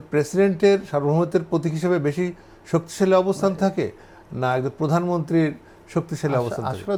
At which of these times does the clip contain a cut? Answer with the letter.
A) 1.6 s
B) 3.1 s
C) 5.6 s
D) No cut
D